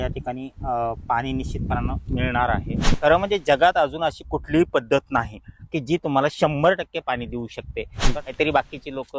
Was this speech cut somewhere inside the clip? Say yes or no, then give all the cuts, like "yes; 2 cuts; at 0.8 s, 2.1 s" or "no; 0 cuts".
yes; 2 cuts; at 3.0 s, 8.0 s